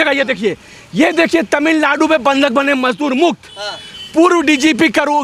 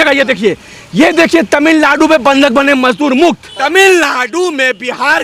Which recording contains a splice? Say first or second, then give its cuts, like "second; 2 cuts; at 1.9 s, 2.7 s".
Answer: second; 1 cut; at 3.5 s